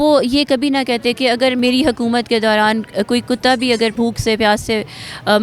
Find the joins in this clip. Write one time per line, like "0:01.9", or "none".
0:01.6
0:03.9